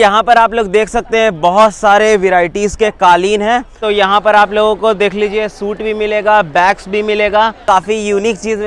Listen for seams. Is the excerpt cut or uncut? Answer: cut